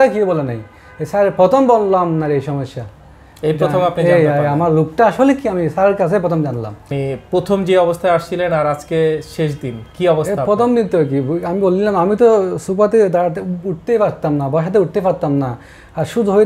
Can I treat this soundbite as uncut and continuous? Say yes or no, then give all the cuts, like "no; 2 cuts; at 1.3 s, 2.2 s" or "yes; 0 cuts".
no; 1 cut; at 6.9 s